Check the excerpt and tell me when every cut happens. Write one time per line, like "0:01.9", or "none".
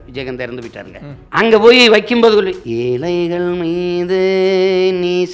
0:01.1
0:02.6